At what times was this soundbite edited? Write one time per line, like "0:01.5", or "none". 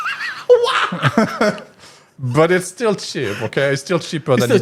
none